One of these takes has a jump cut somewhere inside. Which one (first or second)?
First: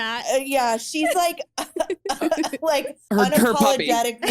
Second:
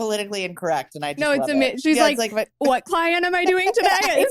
first